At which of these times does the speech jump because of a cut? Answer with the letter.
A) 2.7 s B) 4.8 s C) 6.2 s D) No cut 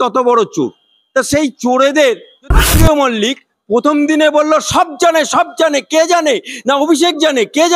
A